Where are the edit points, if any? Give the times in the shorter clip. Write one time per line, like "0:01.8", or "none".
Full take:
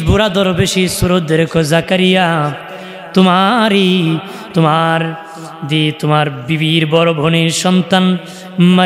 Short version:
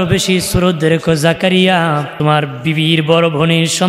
0:02.1